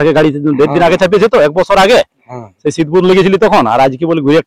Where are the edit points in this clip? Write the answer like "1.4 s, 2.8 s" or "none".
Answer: none